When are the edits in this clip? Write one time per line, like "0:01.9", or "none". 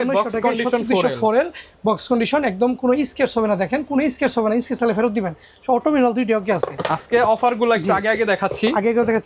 none